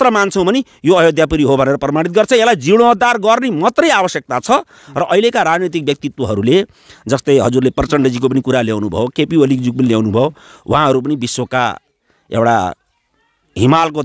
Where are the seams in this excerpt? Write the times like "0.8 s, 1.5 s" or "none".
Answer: none